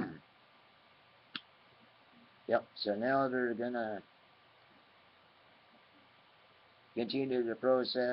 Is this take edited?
no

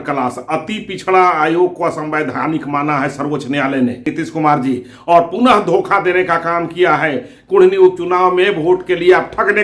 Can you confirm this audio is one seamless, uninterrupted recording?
no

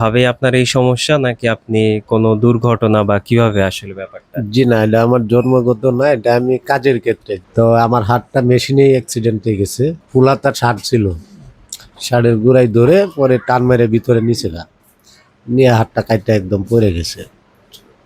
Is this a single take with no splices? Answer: no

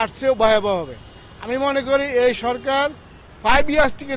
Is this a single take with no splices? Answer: yes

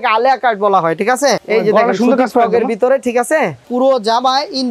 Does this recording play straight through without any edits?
no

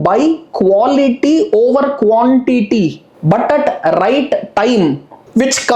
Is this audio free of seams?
yes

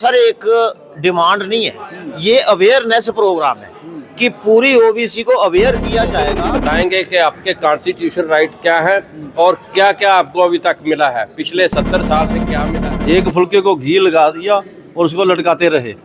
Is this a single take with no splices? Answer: no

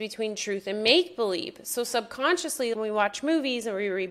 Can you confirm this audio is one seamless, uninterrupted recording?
no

